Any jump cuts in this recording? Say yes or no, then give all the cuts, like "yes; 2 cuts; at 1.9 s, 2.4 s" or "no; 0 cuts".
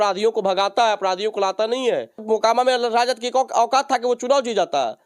yes; 1 cut; at 2.2 s